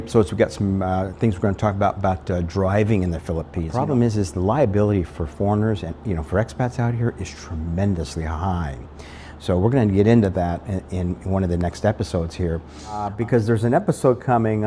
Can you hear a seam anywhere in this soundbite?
yes; 2 cuts; at 3.5 s, 12.9 s

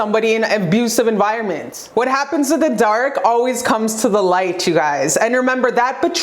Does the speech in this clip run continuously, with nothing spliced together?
no; 1 cut; at 1.7 s

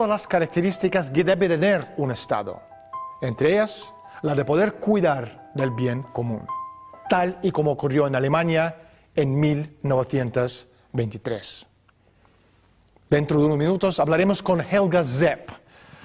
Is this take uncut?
yes; 0 cuts

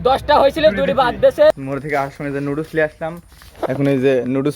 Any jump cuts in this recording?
yes; 1 cut; at 1.5 s

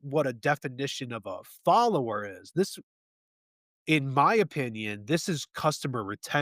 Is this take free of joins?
yes; 0 cuts

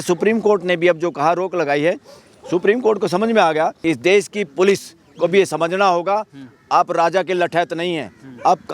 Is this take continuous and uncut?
no; 1 cut; at 3.8 s

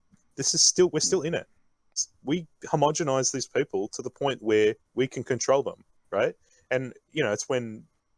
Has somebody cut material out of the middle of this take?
yes; 1 cut; at 2.0 s

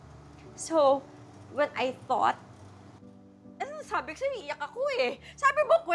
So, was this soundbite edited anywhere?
no; 0 cuts

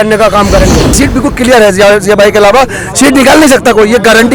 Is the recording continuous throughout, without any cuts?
no; 1 cut; at 1.0 s

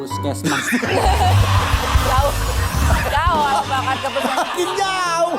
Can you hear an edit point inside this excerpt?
no; 0 cuts

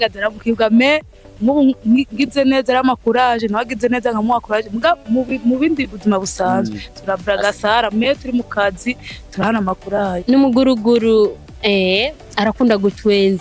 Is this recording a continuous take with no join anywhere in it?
no; 1 cut; at 10.2 s

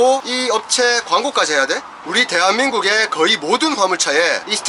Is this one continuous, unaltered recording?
yes; 0 cuts

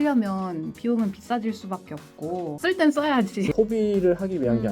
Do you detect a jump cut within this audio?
yes; 2 cuts; at 2.5 s, 3.5 s

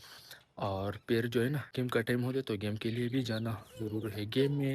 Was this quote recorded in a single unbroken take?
no; 1 cut; at 1.6 s

